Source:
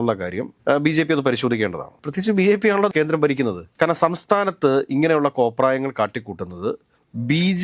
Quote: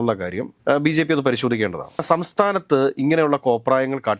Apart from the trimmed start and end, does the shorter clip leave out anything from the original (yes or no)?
yes